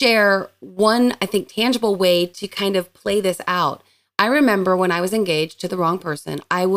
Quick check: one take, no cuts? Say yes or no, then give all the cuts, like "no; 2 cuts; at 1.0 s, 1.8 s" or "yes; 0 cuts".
yes; 0 cuts